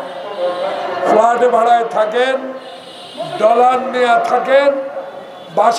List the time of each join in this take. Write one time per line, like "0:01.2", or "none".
none